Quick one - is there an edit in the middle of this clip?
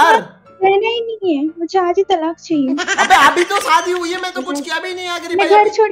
no; 0 cuts

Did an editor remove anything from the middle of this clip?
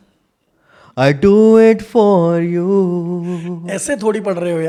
no; 0 cuts

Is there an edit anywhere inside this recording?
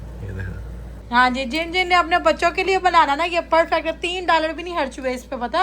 yes; 1 cut; at 0.9 s

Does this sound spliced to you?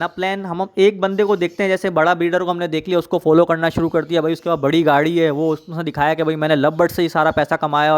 no; 0 cuts

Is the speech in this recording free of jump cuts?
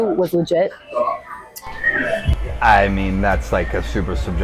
yes; 0 cuts

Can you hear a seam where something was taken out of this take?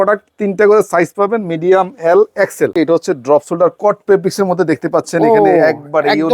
yes; 1 cut; at 2.7 s

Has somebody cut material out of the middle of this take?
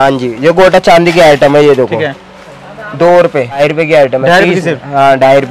yes; 1 cut; at 3.6 s

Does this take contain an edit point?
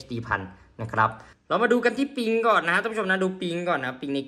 yes; 1 cut; at 1.3 s

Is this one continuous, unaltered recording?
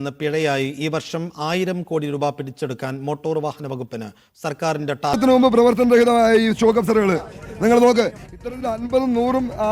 no; 1 cut; at 5.2 s

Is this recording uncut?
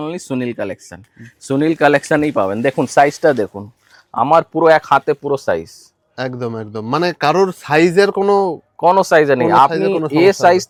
yes; 0 cuts

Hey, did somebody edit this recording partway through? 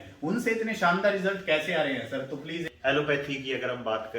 yes; 1 cut; at 2.7 s

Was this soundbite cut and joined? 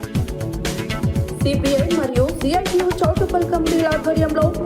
yes; 1 cut; at 1.0 s

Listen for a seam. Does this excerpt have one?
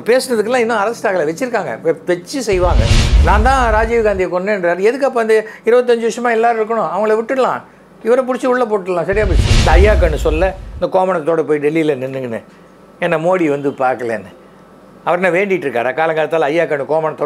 yes; 1 cut; at 9.5 s

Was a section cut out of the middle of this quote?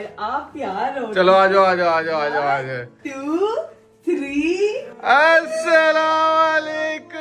no; 0 cuts

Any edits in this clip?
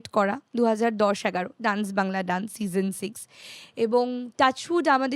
no; 0 cuts

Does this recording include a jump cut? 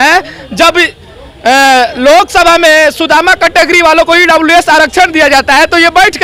no; 0 cuts

